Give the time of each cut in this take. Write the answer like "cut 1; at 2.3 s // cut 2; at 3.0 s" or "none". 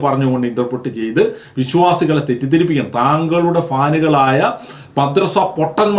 none